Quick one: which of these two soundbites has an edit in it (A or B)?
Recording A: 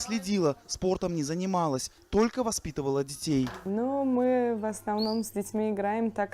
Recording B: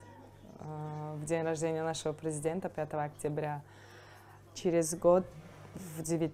A